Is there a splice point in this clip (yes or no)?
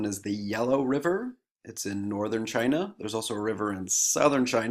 yes